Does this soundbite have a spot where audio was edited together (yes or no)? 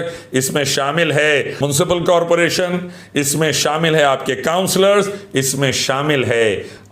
yes